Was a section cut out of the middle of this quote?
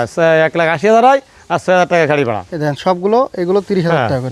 no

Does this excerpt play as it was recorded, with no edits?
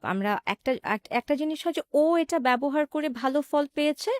yes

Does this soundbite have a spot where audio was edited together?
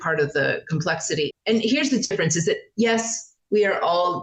yes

